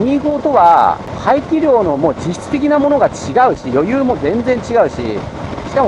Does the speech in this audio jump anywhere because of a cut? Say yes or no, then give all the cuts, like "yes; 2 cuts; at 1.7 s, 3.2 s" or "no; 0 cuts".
yes; 1 cut; at 1.1 s